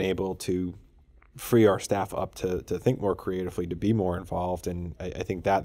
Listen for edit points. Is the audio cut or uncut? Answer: uncut